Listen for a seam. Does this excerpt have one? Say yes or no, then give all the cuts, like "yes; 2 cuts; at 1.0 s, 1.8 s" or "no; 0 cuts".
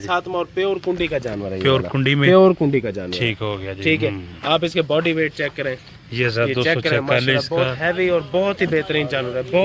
no; 0 cuts